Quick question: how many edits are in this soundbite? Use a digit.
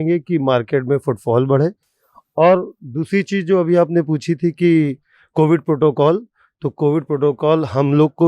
0